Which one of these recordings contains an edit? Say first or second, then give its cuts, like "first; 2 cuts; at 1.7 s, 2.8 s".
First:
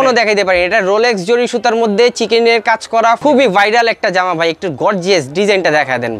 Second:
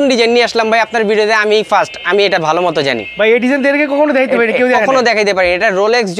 first; 1 cut; at 3.2 s